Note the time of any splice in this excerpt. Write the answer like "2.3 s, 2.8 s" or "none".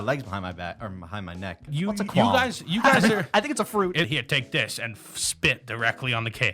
1.7 s, 4.1 s